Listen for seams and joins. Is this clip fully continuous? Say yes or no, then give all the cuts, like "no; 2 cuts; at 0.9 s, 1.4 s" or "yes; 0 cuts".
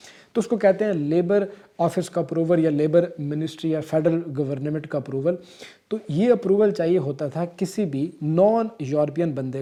yes; 0 cuts